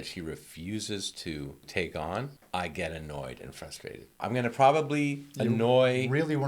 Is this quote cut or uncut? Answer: cut